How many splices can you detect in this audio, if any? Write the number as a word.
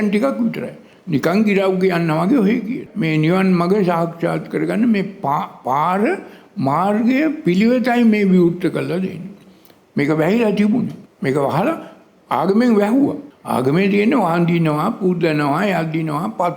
one